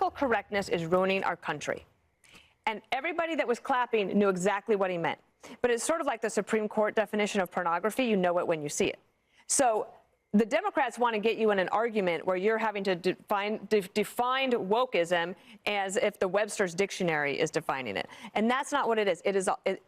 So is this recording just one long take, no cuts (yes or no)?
no